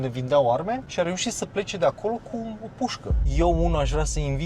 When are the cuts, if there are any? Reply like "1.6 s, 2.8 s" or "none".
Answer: 3.2 s